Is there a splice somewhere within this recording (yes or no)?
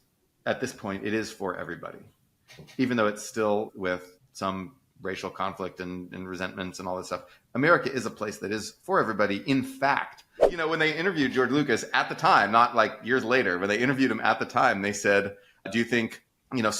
yes